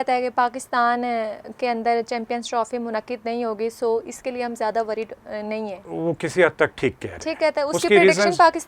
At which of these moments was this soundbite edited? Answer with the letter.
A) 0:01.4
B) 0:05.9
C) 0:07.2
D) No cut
B